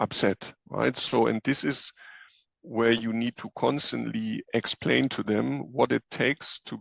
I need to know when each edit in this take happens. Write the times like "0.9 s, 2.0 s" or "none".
none